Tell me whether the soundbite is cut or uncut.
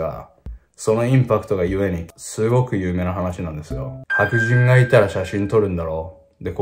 cut